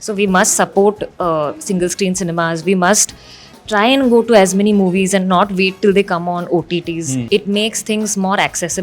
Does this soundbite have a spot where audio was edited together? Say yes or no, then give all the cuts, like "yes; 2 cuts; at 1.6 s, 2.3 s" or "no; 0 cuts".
yes; 1 cut; at 7.3 s